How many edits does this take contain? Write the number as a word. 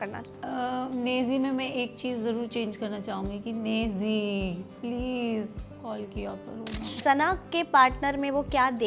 one